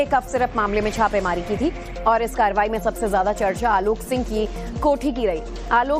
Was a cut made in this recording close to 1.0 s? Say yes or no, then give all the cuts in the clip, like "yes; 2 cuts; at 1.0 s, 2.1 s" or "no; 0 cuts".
yes; 1 cut; at 1.0 s